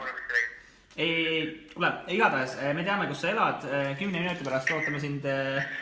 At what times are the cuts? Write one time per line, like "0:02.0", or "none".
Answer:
none